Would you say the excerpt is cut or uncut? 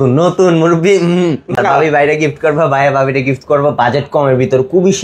cut